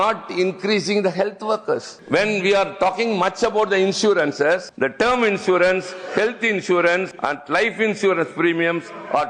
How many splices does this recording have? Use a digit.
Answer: 3